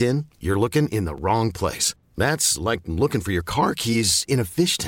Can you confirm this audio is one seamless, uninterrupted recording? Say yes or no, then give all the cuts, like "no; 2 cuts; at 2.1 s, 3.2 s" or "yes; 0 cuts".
yes; 0 cuts